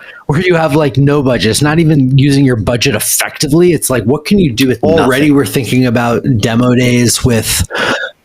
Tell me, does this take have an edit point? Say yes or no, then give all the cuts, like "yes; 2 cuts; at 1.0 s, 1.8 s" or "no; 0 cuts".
yes; 1 cut; at 4.8 s